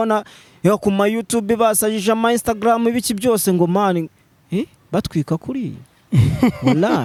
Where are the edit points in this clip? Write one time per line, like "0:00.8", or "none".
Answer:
none